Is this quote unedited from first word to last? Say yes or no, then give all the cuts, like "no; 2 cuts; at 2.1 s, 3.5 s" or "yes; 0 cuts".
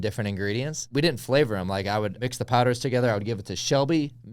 no; 2 cuts; at 0.9 s, 2.1 s